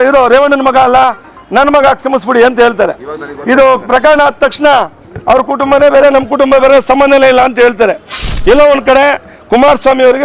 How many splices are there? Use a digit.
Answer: 0